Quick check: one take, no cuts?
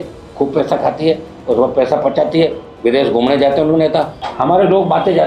no; 1 cut; at 4.2 s

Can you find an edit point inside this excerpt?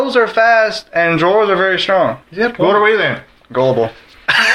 yes; 1 cut; at 2.2 s

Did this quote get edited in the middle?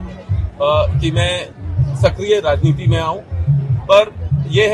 no; 0 cuts

